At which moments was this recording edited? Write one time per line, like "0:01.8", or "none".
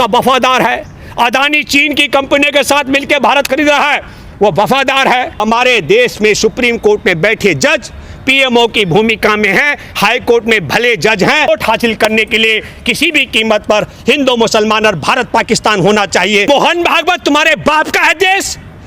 0:05.4
0:11.5
0:16.5